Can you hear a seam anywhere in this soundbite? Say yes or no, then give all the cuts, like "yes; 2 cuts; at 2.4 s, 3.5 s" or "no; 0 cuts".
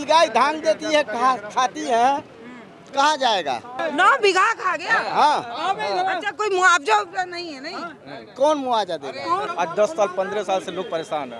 yes; 2 cuts; at 3.8 s, 9.5 s